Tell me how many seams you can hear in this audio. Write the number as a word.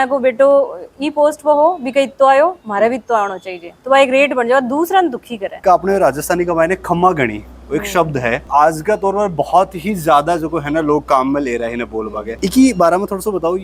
three